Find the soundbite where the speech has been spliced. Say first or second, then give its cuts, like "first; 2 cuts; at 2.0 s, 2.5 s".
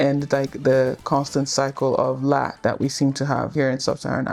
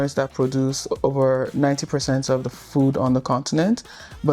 first; 2 cuts; at 2.5 s, 3.5 s